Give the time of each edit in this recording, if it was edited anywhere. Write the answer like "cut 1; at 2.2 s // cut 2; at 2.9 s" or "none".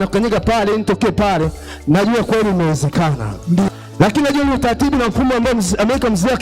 cut 1; at 3.8 s